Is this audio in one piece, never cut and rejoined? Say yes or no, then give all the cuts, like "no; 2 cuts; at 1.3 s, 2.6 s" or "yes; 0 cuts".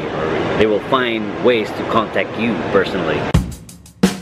no; 1 cut; at 3.3 s